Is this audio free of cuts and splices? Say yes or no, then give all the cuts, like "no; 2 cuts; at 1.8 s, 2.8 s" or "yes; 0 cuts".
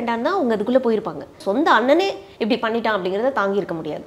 no; 1 cut; at 1.4 s